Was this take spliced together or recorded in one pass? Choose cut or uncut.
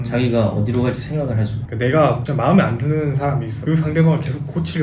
cut